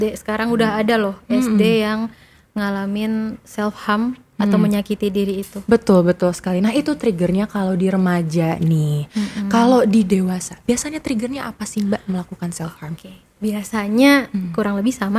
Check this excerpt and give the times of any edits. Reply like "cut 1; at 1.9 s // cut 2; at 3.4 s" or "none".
none